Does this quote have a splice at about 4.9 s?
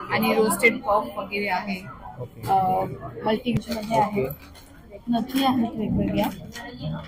no; 1 cut; at 3.5 s

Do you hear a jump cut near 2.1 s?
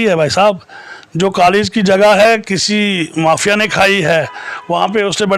no; 0 cuts

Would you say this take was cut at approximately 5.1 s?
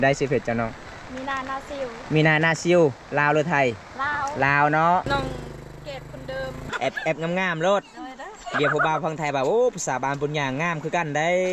yes; 2 cuts; at 5.1 s, 6.6 s

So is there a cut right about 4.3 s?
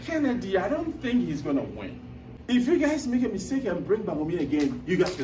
no; 1 cut; at 2.3 s

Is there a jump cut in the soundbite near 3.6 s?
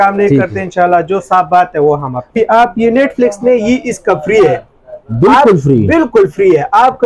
no; 1 cut; at 2.3 s

